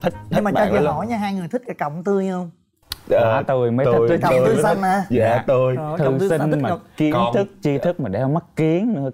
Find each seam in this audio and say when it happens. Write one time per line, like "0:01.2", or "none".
none